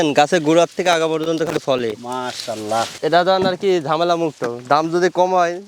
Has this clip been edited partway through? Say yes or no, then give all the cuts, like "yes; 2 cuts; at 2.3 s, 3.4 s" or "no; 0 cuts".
yes; 1 cut; at 3.0 s